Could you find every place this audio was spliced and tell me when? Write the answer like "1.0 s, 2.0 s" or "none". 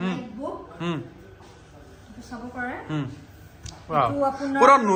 none